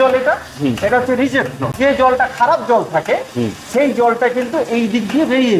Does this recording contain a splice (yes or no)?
yes